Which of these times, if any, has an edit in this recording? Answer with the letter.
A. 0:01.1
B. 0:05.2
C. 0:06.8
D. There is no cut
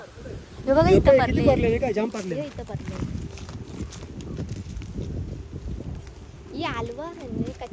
D